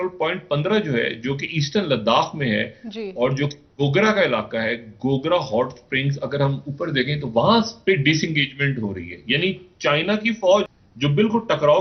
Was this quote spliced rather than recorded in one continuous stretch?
yes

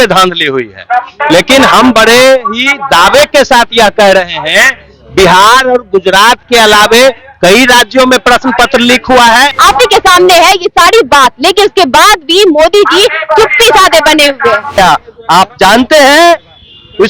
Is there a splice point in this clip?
yes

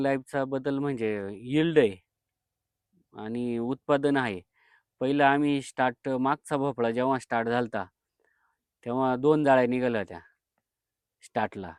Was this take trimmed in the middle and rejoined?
no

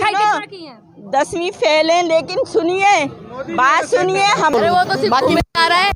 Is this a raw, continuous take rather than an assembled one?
no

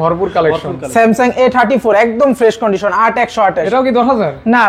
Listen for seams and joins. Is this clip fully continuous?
yes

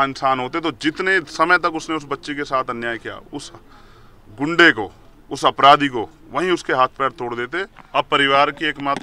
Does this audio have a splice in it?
yes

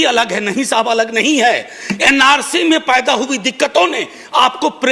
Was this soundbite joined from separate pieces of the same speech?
no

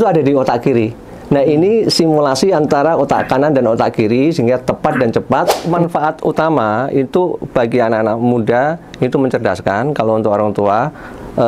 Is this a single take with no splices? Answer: no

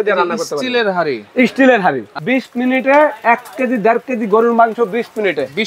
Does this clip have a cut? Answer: yes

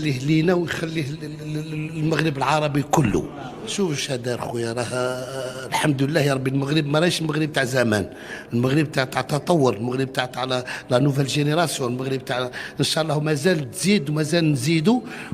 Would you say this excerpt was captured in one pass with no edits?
no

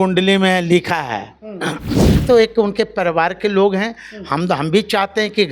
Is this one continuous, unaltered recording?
no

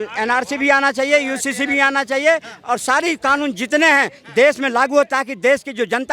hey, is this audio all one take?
yes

